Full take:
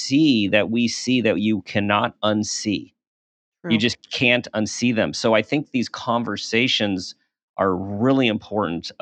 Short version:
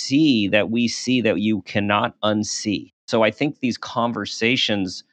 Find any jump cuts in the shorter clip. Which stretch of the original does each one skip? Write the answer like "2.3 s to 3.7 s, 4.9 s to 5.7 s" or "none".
3.0 s to 5.1 s